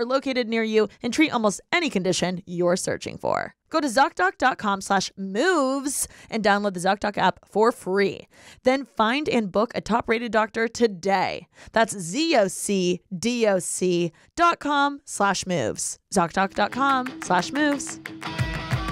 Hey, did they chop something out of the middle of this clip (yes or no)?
yes